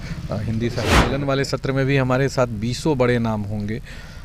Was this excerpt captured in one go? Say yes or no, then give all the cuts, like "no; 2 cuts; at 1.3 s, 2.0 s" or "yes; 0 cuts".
no; 1 cut; at 1.0 s